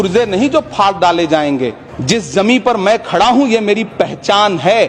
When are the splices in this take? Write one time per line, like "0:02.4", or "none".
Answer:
0:01.9